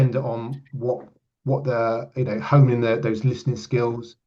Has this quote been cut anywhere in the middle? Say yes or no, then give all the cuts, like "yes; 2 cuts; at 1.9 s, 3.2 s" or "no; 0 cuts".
no; 0 cuts